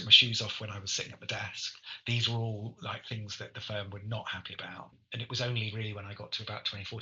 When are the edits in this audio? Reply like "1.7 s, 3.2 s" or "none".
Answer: 4.9 s